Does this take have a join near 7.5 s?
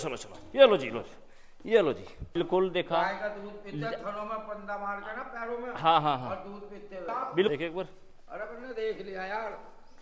yes; 2 cuts; at 2.3 s, 7.5 s

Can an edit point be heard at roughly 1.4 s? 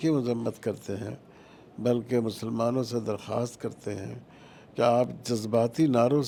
no; 0 cuts

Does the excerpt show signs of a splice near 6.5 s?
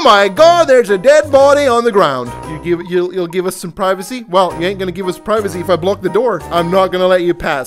yes; 2 cuts; at 2.4 s, 6.5 s

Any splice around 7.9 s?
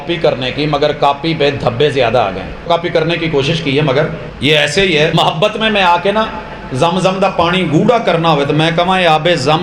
no; 3 cuts; at 2.7 s, 4.3 s, 5.1 s

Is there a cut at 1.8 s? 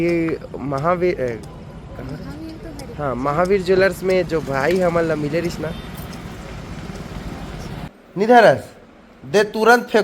no; 1 cut; at 7.9 s

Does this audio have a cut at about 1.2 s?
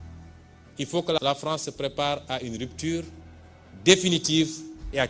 yes; 1 cut; at 1.2 s

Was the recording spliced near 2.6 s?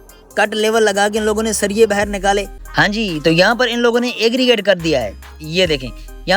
yes; 1 cut; at 2.6 s

